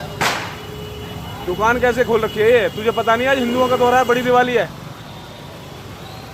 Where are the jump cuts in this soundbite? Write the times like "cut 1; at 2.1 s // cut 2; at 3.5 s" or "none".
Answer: none